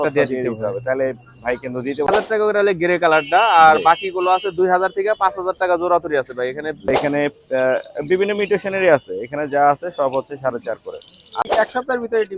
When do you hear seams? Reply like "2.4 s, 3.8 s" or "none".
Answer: 2.1 s, 6.9 s, 11.4 s